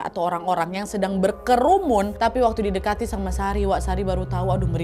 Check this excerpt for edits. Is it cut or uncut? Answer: cut